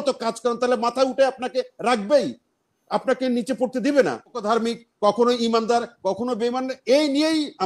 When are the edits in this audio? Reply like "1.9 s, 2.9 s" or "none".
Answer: 4.4 s